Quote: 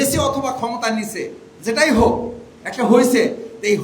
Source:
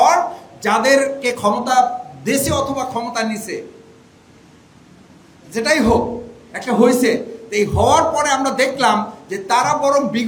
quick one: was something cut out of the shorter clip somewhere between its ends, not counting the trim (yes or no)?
yes